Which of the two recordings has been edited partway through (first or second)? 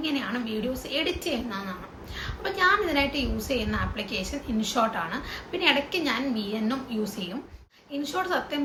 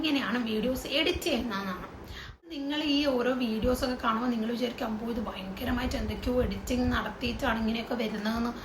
second